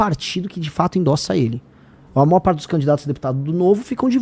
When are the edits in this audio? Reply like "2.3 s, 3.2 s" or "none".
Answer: none